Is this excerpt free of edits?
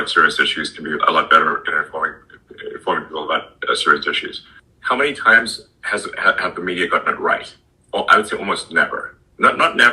yes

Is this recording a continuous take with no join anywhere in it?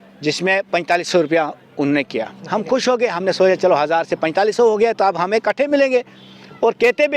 yes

